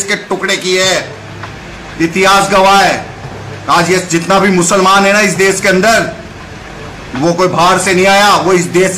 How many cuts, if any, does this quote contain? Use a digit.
0